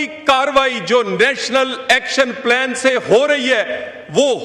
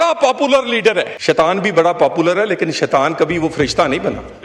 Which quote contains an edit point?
second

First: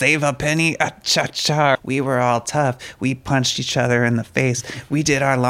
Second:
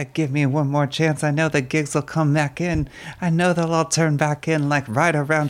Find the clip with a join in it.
first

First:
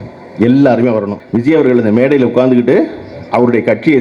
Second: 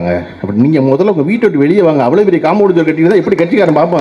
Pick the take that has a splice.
first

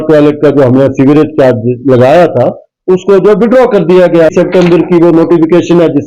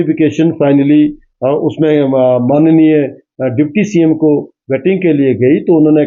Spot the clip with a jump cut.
first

